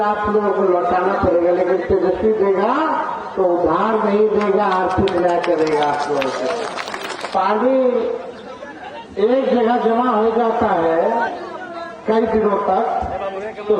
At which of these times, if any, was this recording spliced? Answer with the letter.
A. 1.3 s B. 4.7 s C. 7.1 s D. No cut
C